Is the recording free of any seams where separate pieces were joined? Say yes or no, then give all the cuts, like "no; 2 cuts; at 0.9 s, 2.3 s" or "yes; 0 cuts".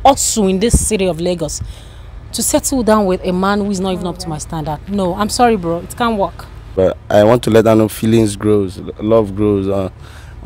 no; 1 cut; at 6.7 s